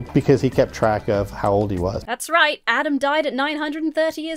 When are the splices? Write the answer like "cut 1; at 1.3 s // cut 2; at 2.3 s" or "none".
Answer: cut 1; at 2.0 s